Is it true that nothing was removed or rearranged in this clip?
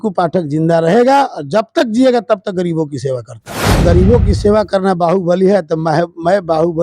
no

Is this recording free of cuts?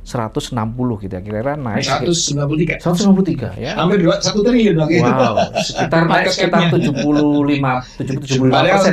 yes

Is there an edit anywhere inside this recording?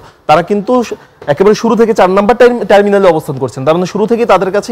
no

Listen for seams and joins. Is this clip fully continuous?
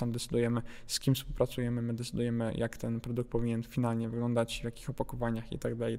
yes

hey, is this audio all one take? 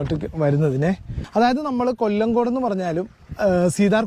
no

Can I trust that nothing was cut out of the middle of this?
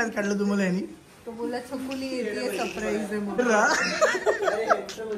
no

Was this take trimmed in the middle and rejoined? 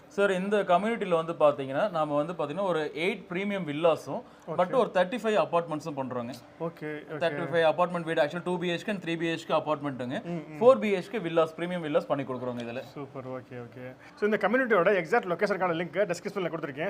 no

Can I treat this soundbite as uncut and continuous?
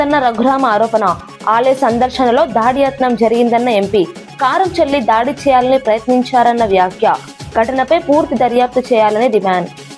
yes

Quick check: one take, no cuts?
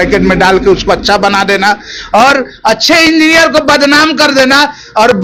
yes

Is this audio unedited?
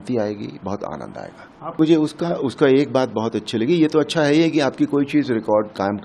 no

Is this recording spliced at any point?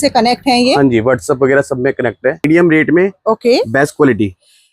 yes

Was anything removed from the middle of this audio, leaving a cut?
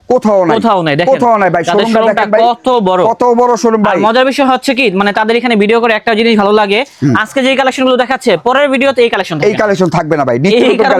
no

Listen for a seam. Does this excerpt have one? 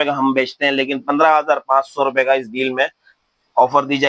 no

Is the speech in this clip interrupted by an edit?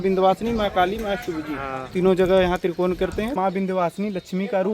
yes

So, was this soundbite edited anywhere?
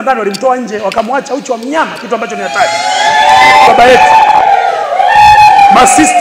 yes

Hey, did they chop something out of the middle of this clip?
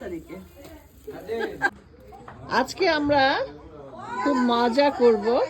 yes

